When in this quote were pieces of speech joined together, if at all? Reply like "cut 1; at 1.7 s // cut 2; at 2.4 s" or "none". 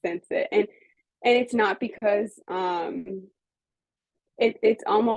none